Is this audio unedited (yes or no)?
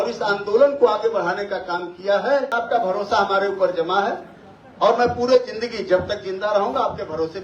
no